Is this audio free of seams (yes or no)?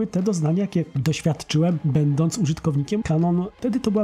no